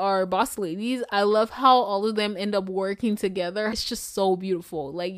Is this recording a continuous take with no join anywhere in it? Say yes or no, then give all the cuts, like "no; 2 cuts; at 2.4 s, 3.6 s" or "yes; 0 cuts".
yes; 0 cuts